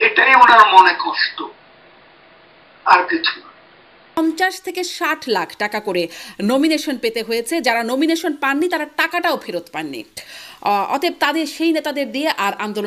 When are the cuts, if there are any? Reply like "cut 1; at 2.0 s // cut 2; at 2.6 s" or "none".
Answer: cut 1; at 4.2 s